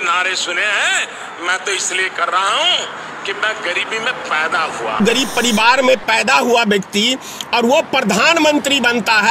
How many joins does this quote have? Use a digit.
1